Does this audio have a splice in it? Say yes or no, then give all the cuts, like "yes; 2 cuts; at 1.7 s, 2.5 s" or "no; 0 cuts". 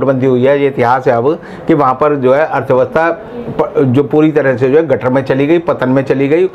no; 0 cuts